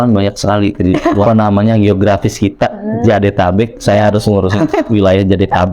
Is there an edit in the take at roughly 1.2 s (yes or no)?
yes